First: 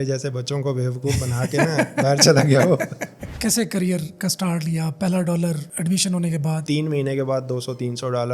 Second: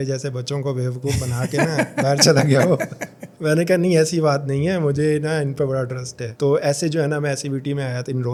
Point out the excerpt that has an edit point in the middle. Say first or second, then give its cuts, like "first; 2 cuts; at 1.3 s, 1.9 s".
first; 2 cuts; at 3.3 s, 6.6 s